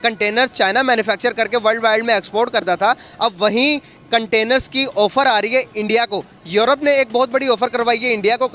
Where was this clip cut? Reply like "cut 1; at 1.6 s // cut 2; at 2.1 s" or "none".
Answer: none